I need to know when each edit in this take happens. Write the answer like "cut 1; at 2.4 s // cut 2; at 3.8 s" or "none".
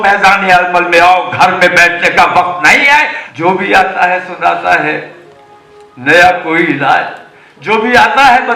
cut 1; at 3.2 s